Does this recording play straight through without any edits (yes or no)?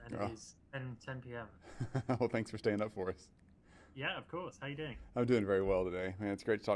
no